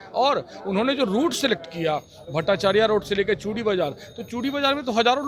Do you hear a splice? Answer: no; 0 cuts

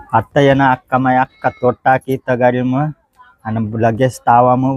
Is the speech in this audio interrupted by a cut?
no; 0 cuts

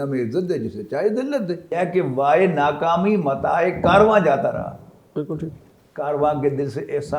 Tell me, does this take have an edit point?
yes; 1 cut; at 1.7 s

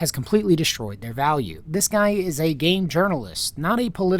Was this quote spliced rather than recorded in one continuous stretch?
yes; 1 cut; at 1.5 s

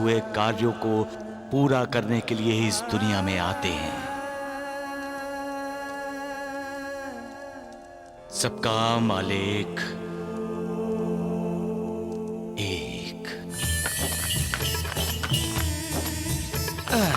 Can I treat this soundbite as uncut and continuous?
yes; 0 cuts

